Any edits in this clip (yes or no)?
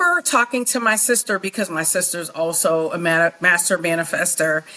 no